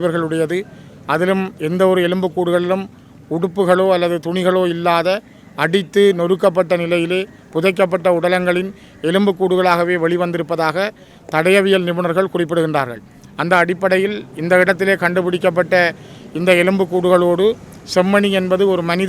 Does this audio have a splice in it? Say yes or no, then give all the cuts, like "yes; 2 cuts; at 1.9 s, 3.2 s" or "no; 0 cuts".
no; 0 cuts